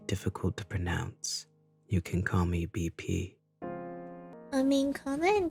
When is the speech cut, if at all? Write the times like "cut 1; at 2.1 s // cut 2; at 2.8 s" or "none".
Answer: none

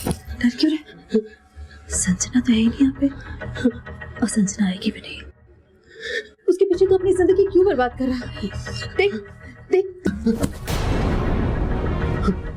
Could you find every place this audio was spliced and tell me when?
none

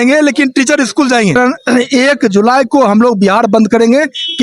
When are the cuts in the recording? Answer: cut 1; at 1.3 s

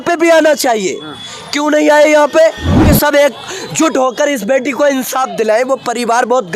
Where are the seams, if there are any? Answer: cut 1; at 2.7 s

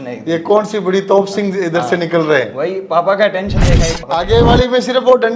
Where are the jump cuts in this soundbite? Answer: cut 1; at 4.0 s

